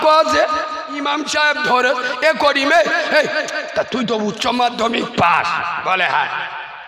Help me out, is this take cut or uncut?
uncut